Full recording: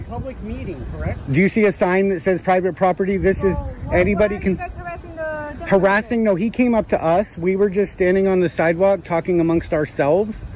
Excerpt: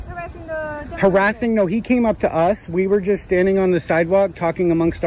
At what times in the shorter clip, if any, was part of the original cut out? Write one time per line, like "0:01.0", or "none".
none